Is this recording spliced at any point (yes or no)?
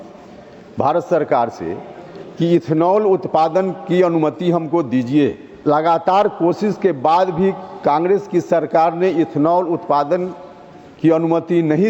yes